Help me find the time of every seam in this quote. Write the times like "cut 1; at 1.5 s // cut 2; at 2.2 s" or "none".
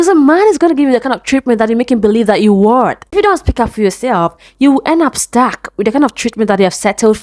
cut 1; at 3.1 s